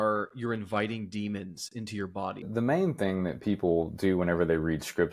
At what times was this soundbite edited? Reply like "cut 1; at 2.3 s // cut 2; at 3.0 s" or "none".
cut 1; at 2.5 s